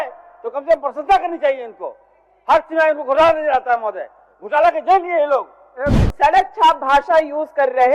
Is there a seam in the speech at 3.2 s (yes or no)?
no